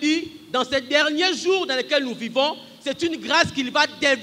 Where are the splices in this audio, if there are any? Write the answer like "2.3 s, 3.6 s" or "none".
none